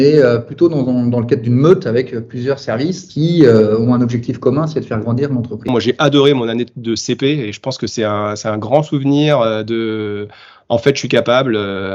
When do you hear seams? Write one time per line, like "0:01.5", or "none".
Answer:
0:03.1
0:05.7